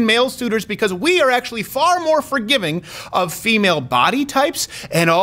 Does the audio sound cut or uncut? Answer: uncut